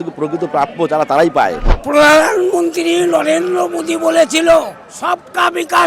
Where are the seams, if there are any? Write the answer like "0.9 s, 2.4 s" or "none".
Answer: 1.7 s